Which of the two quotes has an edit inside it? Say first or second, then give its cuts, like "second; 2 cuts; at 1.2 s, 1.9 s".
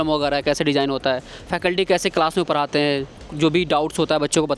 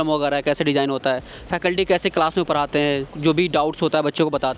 second; 1 cut; at 3.1 s